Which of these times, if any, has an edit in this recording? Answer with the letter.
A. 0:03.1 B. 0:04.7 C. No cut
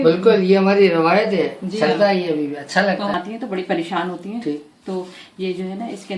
A